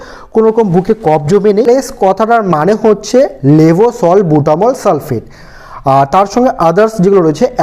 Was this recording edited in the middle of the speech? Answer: yes; 1 cut; at 1.7 s

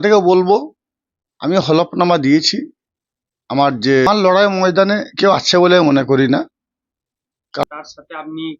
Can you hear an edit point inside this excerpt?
yes; 2 cuts; at 4.1 s, 7.6 s

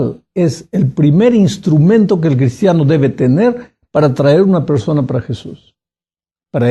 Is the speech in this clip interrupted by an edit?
yes; 1 cut; at 5.0 s

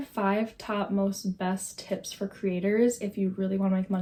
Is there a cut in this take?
no; 0 cuts

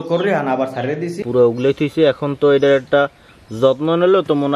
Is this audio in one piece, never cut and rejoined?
no; 1 cut; at 1.2 s

